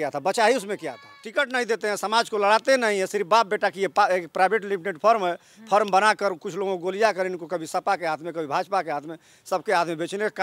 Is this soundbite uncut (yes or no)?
no